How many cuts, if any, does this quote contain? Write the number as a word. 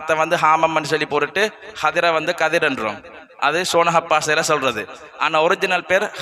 zero